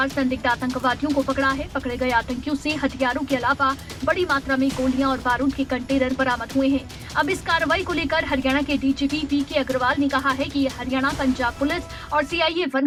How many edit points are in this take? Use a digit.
0